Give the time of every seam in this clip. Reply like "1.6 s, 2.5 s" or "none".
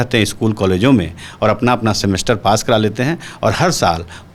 none